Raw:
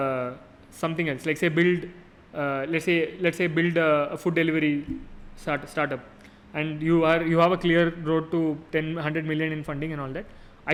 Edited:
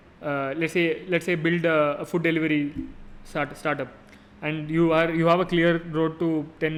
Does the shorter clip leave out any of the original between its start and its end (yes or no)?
no